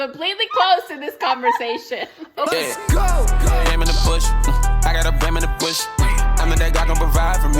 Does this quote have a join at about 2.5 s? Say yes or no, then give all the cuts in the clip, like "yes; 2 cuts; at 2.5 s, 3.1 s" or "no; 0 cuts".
yes; 1 cut; at 2.5 s